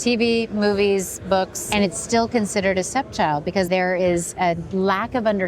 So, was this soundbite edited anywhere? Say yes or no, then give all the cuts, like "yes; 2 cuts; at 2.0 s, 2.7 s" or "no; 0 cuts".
yes; 1 cut; at 1.6 s